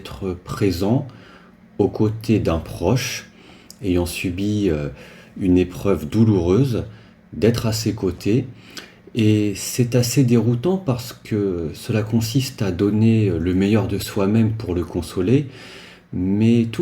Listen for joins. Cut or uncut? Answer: uncut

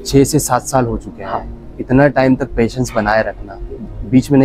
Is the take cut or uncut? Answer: cut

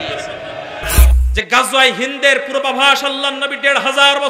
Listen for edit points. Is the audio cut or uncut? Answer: cut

